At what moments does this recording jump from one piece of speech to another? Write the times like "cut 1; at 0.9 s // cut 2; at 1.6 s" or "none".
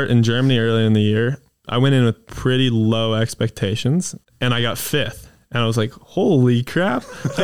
cut 1; at 1.6 s // cut 2; at 4.2 s